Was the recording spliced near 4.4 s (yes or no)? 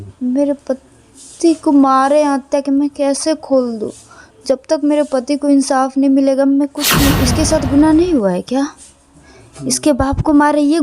no